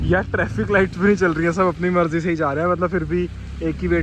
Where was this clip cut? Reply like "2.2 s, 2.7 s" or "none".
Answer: none